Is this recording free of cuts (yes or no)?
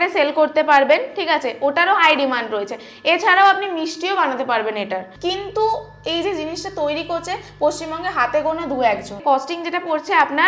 no